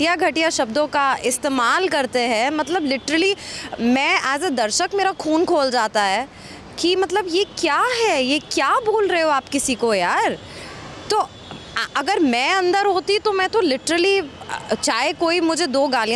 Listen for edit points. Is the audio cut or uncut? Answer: uncut